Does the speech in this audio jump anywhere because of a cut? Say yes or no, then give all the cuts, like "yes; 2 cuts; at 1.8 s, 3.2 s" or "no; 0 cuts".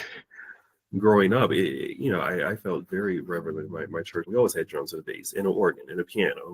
yes; 1 cut; at 4.3 s